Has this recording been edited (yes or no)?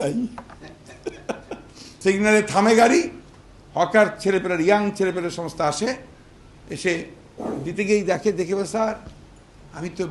yes